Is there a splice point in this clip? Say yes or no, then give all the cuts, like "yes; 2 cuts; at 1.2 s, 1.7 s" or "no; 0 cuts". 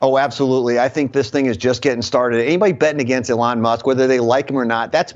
no; 0 cuts